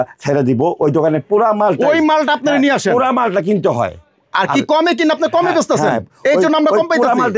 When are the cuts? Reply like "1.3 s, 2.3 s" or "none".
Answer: none